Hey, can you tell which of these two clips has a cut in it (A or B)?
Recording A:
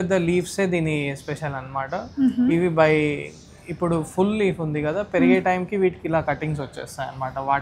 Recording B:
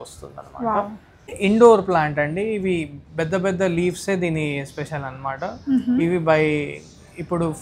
B